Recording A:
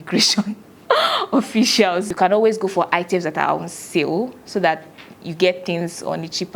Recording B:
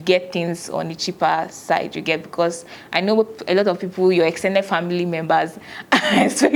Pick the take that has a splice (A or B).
A